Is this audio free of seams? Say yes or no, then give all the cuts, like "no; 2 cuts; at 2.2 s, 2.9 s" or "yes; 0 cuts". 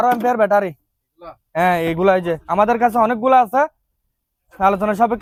yes; 0 cuts